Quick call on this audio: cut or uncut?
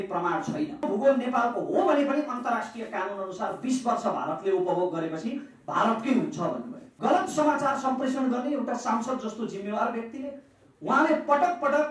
cut